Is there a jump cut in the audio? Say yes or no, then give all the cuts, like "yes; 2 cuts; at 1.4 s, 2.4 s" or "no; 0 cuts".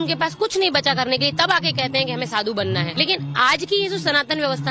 yes; 1 cut; at 1.7 s